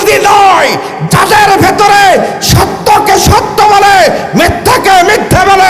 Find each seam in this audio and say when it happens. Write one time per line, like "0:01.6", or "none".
none